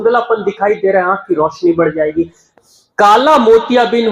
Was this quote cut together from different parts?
yes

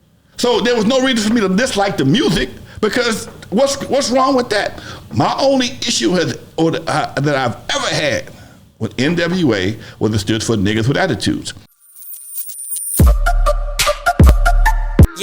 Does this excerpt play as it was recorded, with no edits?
no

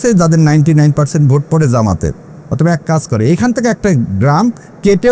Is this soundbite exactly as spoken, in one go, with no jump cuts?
yes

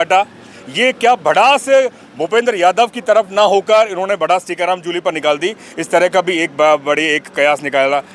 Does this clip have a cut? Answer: no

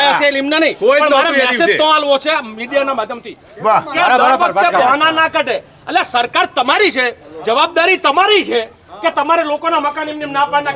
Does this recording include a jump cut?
no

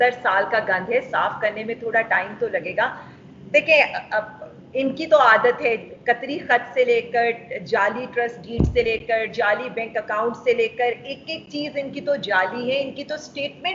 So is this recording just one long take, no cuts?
yes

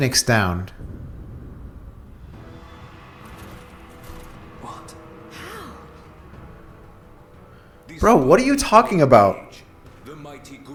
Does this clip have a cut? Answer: no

